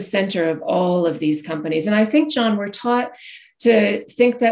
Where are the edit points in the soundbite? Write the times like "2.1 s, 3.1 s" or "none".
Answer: none